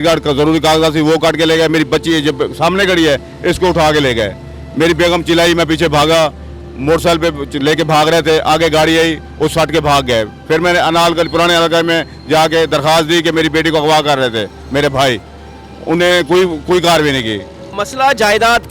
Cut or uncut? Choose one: cut